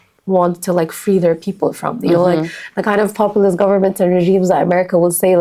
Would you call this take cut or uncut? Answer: uncut